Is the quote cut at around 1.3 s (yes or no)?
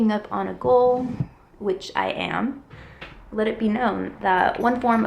no